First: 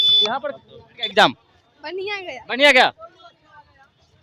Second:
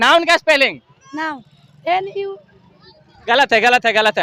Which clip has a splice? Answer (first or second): first